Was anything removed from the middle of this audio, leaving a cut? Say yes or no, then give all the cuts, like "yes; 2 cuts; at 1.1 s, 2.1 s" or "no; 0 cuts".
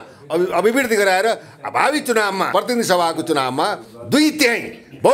yes; 1 cut; at 2.5 s